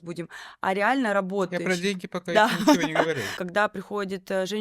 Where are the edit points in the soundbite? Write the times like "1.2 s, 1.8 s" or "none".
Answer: 3.3 s

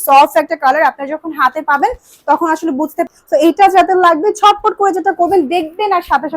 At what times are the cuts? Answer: 3.0 s

